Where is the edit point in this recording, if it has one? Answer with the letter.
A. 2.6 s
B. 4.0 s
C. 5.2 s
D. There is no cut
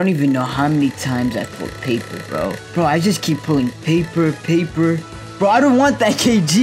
A